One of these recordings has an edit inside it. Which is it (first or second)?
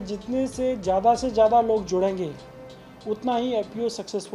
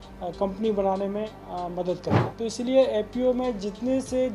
second